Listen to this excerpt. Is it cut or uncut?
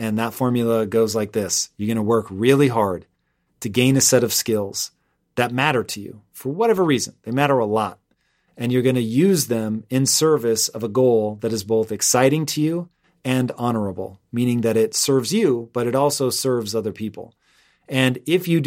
uncut